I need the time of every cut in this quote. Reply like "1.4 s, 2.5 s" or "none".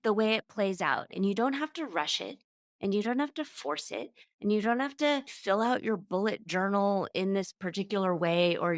1.1 s, 5.3 s